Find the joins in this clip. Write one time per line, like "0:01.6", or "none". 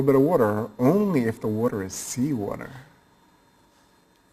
none